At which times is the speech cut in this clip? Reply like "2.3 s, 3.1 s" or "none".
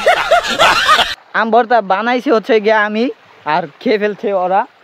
1.1 s